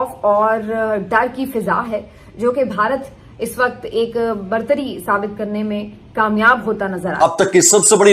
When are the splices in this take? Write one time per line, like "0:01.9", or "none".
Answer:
0:07.2